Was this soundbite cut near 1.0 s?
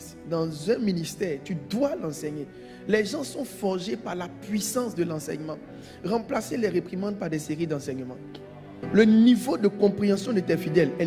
no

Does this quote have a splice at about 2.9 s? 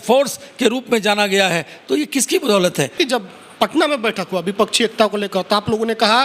yes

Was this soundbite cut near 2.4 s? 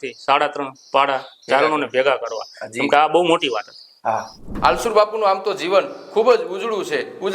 no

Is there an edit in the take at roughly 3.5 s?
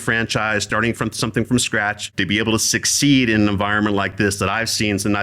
no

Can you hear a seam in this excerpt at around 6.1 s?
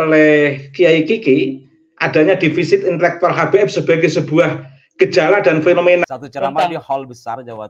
yes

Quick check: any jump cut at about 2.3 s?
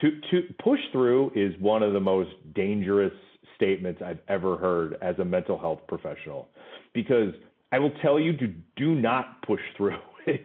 no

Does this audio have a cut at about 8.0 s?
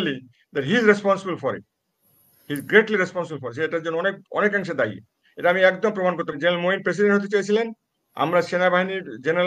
no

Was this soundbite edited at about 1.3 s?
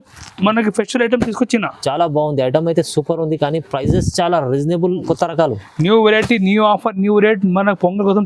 no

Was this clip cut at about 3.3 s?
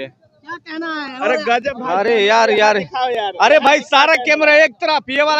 no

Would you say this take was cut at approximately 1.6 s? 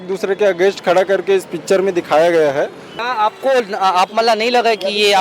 no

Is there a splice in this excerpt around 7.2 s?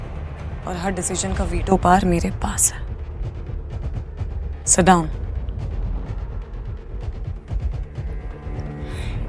no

